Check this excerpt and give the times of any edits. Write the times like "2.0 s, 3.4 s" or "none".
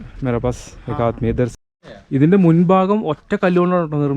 1.5 s